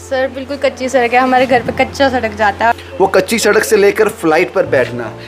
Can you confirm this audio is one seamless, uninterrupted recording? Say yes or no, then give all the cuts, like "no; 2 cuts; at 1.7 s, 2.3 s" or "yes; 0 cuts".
no; 1 cut; at 2.7 s